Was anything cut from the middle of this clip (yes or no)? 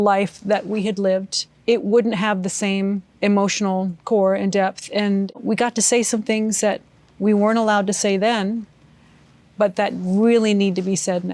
yes